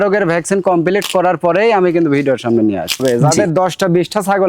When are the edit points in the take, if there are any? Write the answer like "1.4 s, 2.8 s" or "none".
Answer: 3.0 s